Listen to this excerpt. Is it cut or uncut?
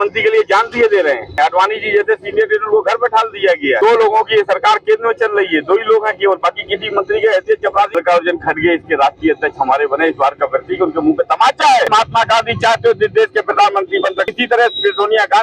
cut